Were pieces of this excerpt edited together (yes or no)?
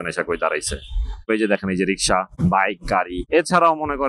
yes